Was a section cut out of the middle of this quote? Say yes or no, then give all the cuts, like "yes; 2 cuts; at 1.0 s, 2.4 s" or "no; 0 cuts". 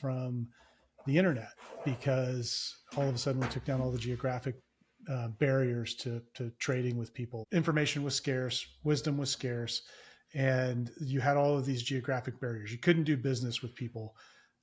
yes; 1 cut; at 7.4 s